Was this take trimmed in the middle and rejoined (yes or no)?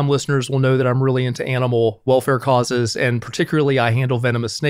yes